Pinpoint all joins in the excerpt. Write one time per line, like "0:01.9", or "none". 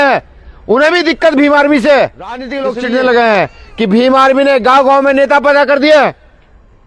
0:02.5